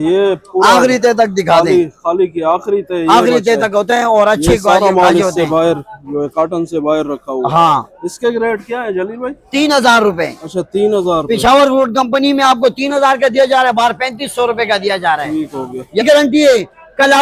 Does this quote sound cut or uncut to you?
uncut